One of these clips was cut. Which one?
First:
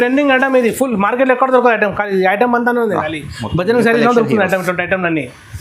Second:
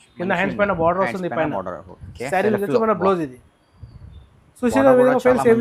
second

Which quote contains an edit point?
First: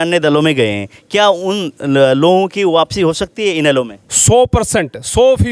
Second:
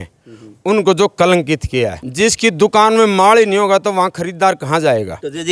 second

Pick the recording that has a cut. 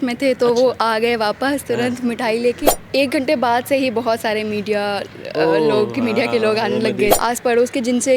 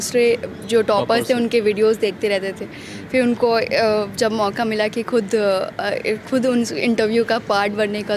first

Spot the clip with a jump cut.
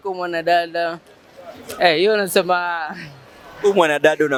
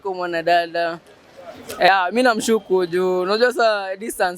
second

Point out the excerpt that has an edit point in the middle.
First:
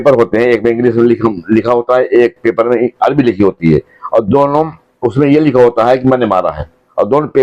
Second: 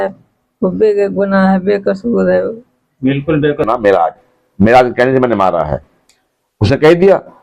second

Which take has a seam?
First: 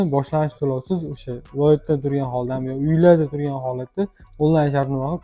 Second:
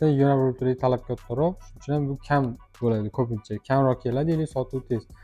second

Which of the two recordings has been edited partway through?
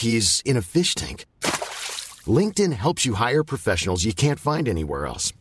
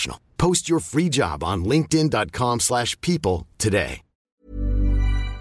second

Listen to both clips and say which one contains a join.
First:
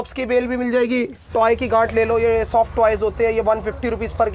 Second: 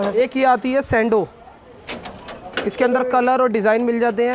first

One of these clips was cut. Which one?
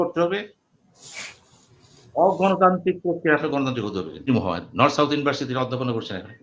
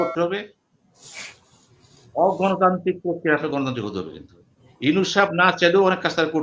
first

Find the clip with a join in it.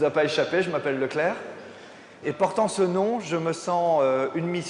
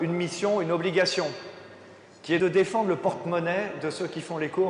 second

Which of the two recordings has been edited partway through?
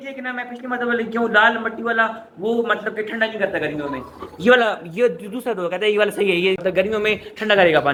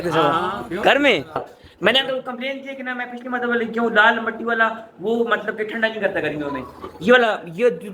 second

